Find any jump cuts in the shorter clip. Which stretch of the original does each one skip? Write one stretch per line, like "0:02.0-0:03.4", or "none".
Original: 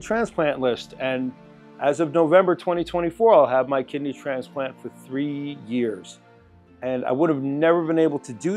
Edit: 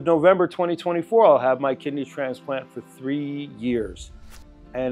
none